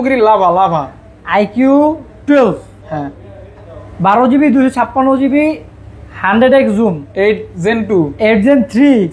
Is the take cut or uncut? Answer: uncut